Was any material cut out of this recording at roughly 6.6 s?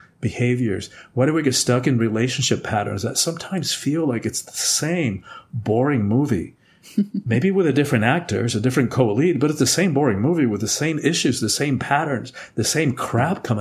no; 0 cuts

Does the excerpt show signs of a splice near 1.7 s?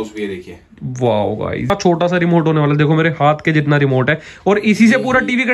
yes; 1 cut; at 1.7 s

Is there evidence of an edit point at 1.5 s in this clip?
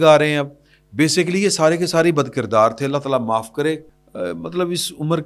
no; 1 cut; at 3.9 s

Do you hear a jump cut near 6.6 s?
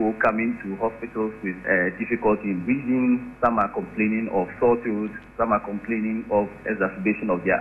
yes; 2 cuts; at 1.6 s, 6.6 s

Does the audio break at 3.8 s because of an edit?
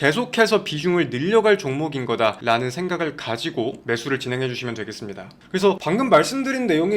no; 1 cut; at 5.2 s

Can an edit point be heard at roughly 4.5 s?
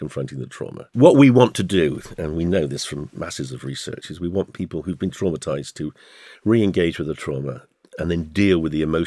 no; 1 cut; at 0.9 s

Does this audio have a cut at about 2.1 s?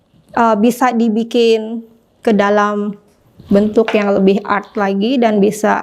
no; 0 cuts

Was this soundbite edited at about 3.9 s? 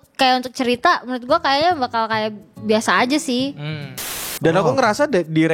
yes; 1 cut; at 3.9 s

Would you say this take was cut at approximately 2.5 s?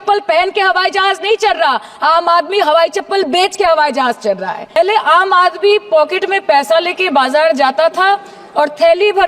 no; 1 cut; at 4.8 s

